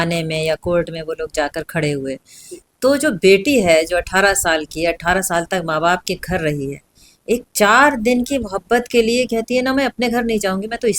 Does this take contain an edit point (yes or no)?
no